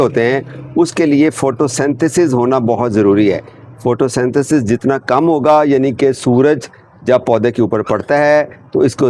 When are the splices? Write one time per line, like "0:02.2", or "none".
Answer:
none